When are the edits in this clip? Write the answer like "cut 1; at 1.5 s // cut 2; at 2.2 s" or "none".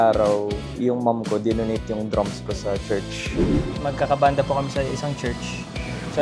cut 1; at 3.7 s